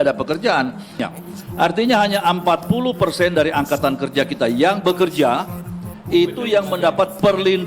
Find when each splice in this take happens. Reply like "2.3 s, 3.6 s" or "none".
1.0 s